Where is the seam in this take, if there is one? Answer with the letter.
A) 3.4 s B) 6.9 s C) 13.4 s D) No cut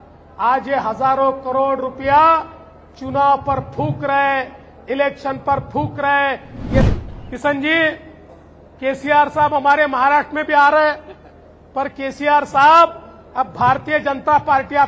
B